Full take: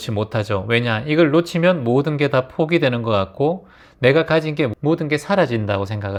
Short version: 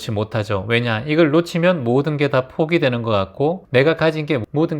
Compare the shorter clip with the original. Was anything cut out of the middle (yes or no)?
yes